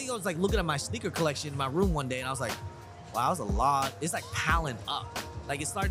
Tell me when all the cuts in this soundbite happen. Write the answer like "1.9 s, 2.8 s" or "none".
none